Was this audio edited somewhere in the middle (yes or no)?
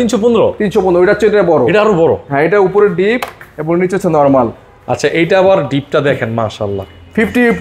no